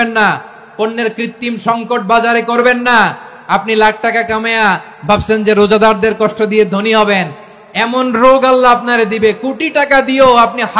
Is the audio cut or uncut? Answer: uncut